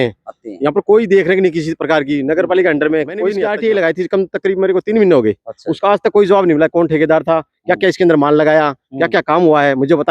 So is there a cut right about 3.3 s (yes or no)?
yes